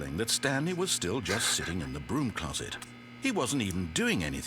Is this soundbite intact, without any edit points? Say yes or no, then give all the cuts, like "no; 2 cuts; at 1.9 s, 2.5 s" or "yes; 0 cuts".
yes; 0 cuts